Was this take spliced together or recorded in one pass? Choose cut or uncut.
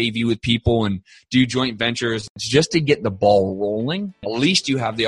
cut